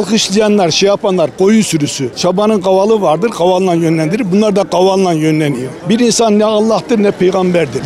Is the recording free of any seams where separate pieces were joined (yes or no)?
yes